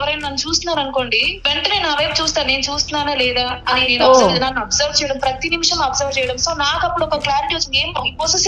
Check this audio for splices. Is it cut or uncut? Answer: cut